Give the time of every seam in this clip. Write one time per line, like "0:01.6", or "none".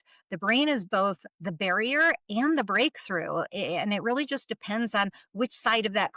none